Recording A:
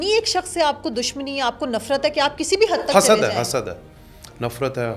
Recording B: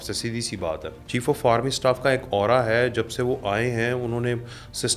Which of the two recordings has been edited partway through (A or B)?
B